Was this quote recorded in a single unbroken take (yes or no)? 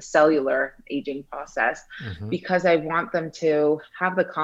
yes